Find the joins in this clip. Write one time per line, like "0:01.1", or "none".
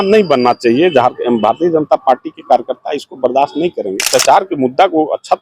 0:04.0